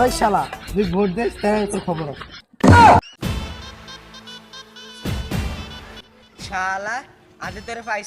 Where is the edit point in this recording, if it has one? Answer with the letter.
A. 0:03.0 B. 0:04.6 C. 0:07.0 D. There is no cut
A